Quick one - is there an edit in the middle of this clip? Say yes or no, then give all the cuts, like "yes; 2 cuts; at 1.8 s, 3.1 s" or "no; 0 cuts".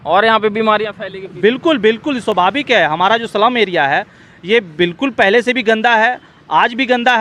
no; 0 cuts